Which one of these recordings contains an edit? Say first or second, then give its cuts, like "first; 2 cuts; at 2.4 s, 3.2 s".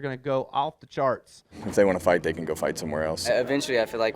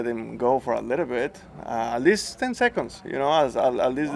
first; 2 cuts; at 1.6 s, 3.2 s